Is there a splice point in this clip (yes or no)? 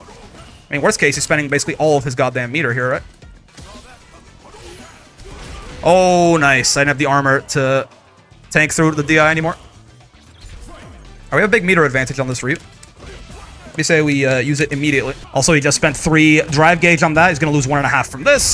yes